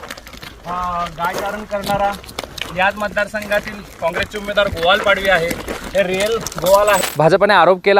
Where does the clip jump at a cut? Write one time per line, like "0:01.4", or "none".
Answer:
0:07.0